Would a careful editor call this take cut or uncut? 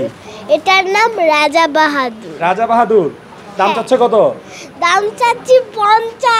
uncut